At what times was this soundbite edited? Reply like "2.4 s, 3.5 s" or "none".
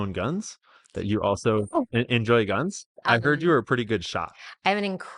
3.0 s